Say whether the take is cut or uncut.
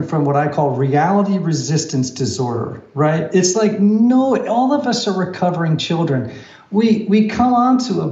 uncut